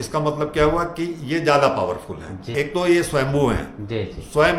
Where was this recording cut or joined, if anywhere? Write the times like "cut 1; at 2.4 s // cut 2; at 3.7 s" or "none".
cut 1; at 2.5 s